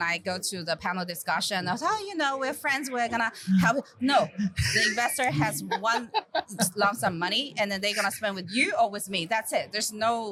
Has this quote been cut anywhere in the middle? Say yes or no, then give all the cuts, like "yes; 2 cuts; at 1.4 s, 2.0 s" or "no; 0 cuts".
no; 0 cuts